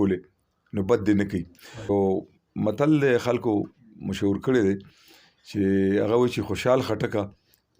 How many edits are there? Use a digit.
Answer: 1